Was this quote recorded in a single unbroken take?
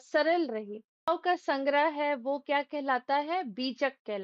no; 1 cut; at 1.1 s

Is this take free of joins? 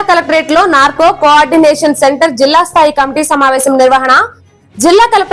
yes; 0 cuts

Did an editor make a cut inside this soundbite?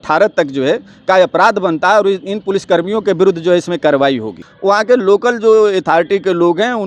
yes; 1 cut; at 4.4 s

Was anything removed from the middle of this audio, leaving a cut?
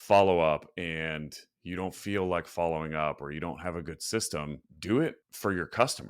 yes; 2 cuts; at 4.7 s, 5.3 s

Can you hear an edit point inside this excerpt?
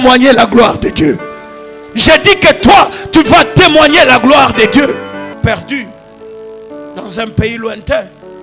yes; 1 cut; at 5.3 s

